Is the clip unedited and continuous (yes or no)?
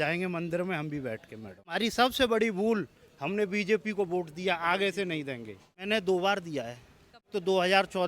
no